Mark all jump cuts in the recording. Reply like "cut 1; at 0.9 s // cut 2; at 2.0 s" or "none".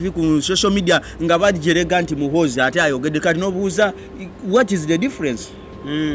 none